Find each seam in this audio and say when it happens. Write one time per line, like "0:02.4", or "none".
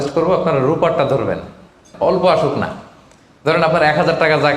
0:01.9